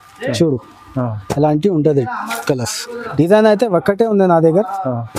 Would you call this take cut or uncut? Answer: uncut